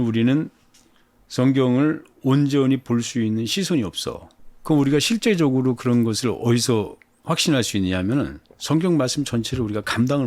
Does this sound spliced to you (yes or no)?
no